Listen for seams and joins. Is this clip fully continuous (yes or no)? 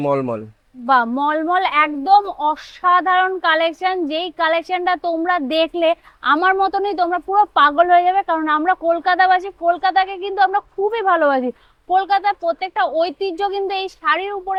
yes